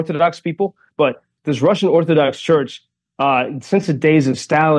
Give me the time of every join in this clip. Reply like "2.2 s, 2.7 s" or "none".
1.0 s